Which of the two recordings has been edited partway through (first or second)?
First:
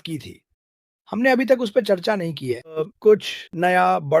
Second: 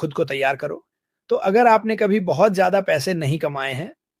first